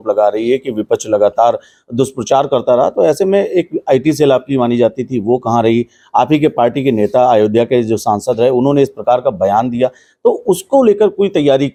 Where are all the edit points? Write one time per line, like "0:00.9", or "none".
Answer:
none